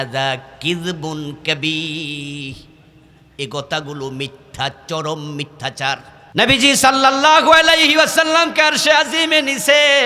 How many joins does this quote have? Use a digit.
1